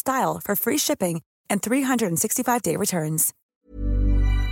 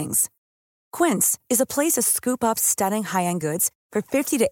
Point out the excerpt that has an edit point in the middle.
first; 1 cut; at 3.3 s

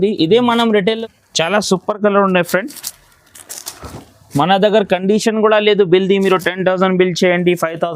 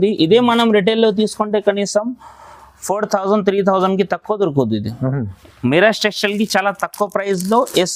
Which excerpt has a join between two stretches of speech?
first; 1 cut; at 1.0 s

